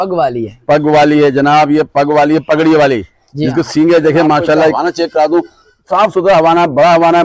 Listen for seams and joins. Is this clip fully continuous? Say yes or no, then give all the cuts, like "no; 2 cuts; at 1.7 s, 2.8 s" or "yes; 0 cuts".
no; 1 cut; at 4.8 s